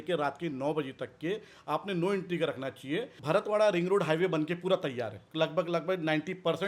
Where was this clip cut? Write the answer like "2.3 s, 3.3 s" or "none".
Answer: 3.1 s, 5.2 s